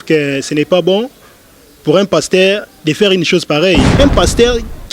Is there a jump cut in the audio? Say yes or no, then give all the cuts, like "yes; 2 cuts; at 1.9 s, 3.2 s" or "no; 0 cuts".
yes; 1 cut; at 3.9 s